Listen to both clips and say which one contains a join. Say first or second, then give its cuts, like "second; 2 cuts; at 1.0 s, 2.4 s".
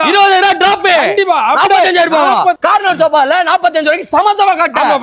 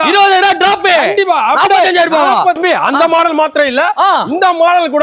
first; 1 cut; at 2.6 s